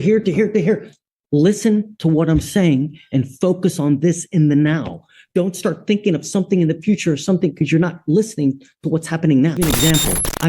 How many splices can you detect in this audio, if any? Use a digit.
1